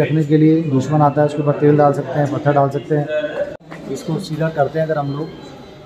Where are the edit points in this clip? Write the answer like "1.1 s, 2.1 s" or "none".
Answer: 3.6 s